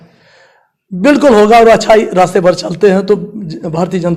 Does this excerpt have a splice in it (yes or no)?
no